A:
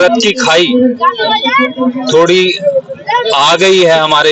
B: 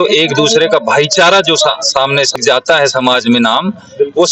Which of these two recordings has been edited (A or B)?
B